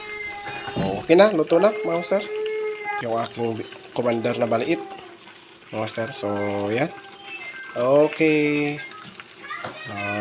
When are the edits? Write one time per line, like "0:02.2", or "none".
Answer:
0:03.0